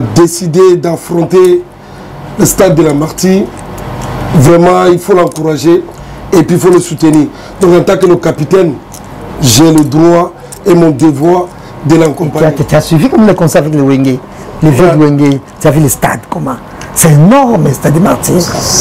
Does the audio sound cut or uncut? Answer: cut